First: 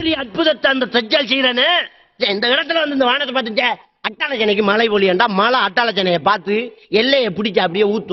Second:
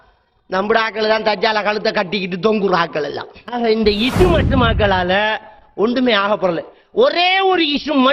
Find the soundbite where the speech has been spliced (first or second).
second